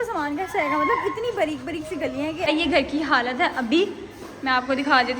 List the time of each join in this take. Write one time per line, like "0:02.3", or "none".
0:02.5